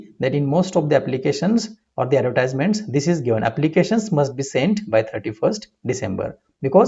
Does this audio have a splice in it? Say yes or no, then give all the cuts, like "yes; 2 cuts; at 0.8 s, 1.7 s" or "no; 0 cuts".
no; 0 cuts